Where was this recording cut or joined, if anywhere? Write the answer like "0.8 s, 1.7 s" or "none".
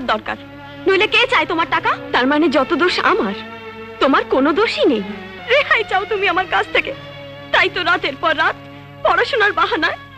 2.0 s, 5.3 s